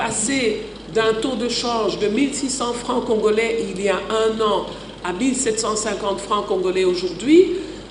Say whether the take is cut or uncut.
uncut